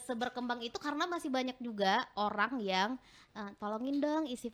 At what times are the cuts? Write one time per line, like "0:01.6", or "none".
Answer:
none